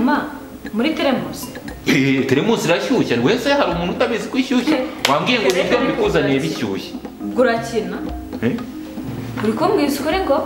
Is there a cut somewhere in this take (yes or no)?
no